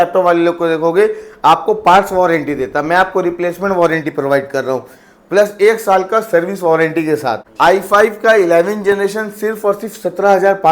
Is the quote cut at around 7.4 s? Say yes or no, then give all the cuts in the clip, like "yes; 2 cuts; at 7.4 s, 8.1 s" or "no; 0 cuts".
yes; 1 cut; at 7.4 s